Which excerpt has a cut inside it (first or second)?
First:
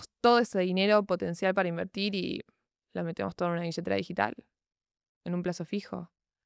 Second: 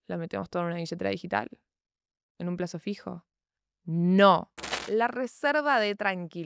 second